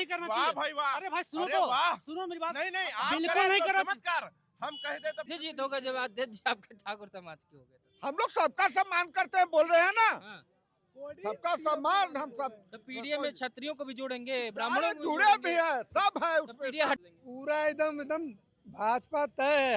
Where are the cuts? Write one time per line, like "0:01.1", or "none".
0:05.2
0:17.0